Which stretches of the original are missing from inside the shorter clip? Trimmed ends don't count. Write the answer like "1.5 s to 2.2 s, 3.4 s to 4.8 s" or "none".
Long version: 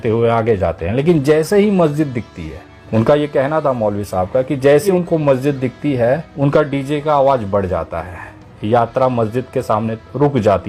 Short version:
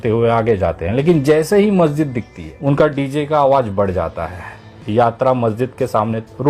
2.5 s to 6.3 s